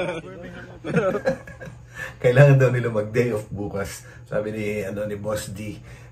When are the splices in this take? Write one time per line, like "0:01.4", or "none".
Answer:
none